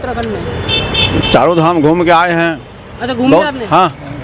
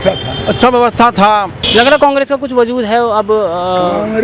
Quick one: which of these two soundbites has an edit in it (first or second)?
second